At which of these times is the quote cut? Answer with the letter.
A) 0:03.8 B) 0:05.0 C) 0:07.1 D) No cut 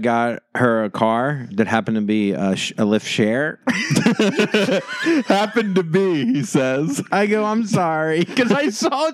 C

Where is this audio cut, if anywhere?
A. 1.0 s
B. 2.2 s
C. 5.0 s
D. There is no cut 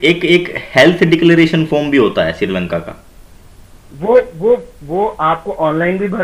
D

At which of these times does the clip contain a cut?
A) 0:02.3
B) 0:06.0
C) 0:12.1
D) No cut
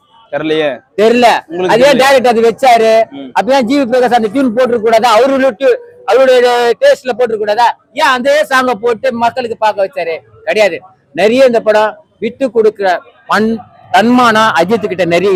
D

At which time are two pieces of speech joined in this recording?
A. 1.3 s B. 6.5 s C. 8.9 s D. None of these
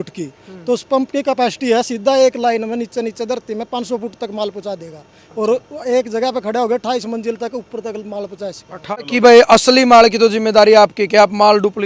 C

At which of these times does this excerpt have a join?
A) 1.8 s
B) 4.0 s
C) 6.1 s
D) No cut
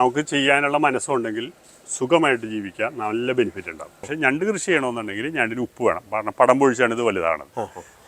B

